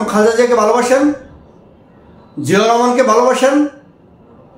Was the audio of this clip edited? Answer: no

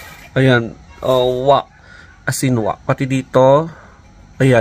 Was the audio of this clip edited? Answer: no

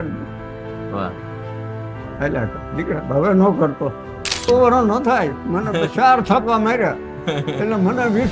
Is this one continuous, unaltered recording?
no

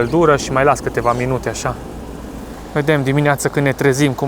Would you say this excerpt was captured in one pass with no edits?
no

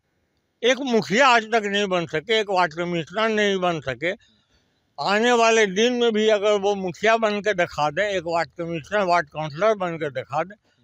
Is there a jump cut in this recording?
no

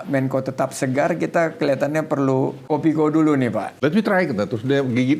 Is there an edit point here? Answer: yes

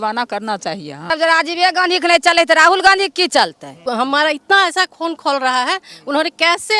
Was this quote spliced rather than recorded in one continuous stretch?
yes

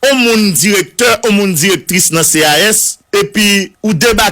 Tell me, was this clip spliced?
yes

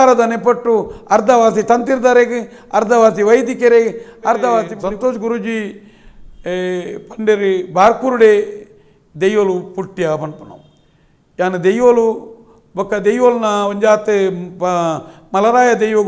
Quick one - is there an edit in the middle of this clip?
yes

